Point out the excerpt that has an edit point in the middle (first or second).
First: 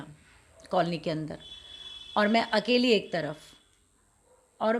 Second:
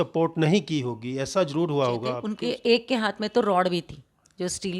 second